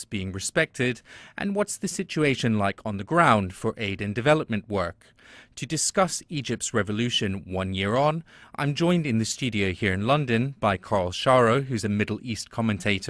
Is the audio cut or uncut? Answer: cut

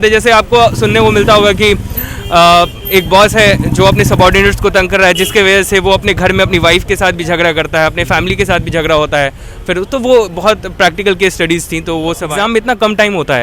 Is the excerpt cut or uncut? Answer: cut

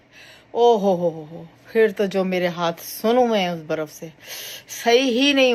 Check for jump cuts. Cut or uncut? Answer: uncut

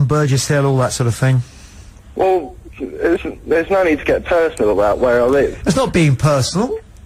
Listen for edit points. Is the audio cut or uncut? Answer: uncut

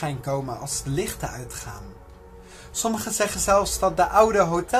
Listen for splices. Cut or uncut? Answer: cut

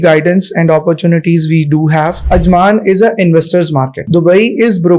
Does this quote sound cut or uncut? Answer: cut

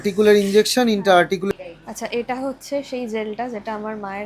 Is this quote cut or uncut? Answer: cut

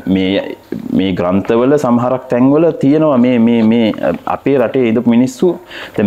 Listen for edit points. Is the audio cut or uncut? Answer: uncut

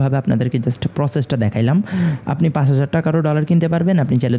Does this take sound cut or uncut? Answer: uncut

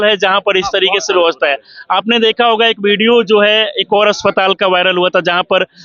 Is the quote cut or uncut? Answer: uncut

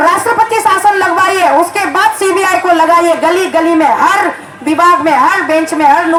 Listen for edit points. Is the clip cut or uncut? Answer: uncut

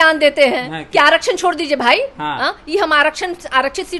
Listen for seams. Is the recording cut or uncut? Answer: uncut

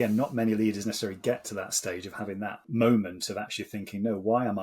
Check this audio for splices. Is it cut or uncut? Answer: cut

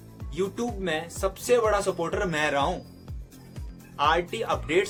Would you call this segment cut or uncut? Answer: uncut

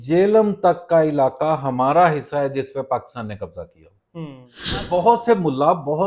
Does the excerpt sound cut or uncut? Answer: cut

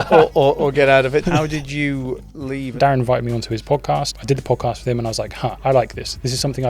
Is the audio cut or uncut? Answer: cut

